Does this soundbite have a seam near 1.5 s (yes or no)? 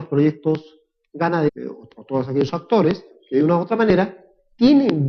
no